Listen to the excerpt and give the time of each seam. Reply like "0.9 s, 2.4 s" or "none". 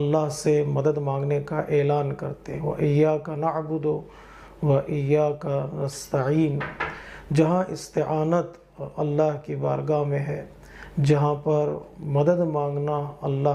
none